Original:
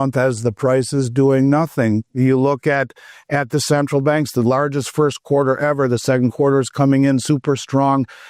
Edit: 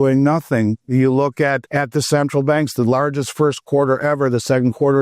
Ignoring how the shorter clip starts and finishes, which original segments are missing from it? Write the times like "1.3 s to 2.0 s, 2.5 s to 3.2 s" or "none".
2.9 s to 3.2 s